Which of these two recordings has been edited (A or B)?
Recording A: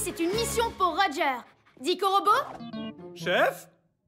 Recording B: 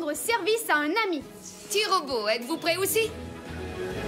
B